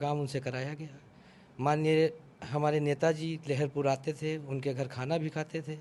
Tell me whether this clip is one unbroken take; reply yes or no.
yes